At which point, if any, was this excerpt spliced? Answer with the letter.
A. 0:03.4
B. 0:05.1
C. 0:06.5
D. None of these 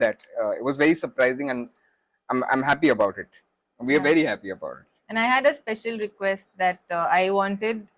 D